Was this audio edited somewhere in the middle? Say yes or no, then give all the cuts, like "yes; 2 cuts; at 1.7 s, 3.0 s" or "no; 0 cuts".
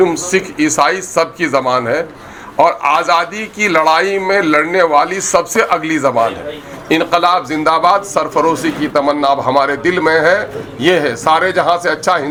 no; 0 cuts